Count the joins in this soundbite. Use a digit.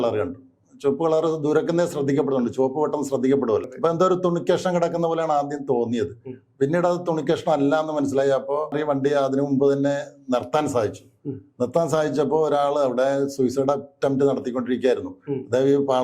2